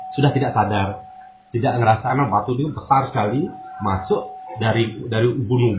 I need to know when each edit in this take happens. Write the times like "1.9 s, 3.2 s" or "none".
2.0 s